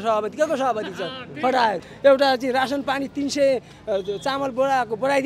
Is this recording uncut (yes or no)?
no